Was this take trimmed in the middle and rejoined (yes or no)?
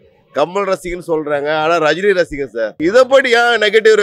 yes